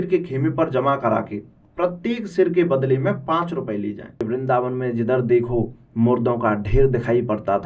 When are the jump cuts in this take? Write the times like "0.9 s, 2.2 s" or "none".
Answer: 4.3 s